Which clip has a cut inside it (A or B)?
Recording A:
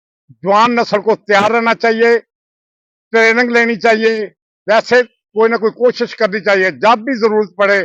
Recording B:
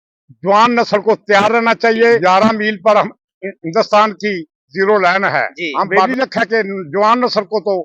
B